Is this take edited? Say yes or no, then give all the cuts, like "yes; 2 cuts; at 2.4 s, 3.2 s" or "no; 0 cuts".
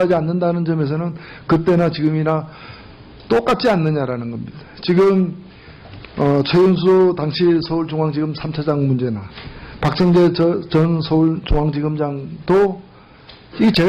no; 0 cuts